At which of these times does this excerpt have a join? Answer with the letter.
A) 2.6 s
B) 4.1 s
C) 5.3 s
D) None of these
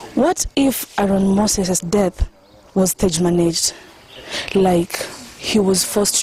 D